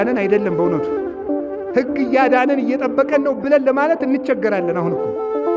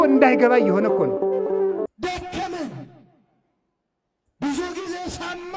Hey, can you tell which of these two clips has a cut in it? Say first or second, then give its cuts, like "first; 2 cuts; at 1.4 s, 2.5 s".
second; 1 cut; at 1.9 s